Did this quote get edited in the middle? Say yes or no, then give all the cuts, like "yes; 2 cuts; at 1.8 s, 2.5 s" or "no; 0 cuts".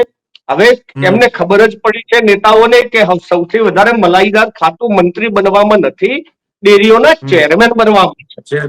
no; 0 cuts